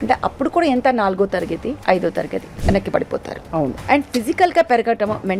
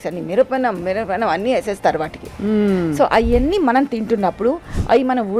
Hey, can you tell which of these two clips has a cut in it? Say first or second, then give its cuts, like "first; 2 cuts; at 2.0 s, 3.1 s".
first; 3 cuts; at 1.8 s, 2.5 s, 3.8 s